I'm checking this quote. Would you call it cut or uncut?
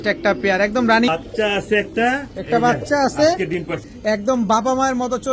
cut